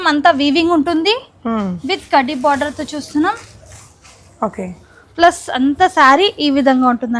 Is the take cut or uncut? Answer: uncut